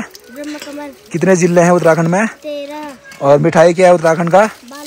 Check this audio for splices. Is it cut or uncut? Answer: uncut